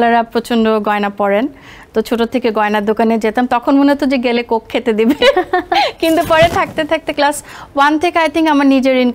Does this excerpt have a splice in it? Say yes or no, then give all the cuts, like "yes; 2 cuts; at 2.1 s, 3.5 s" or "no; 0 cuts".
no; 0 cuts